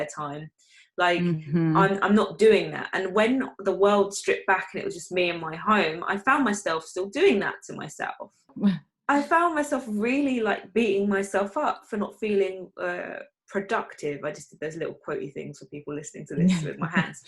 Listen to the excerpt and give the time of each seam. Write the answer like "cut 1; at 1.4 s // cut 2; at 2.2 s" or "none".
cut 1; at 8.5 s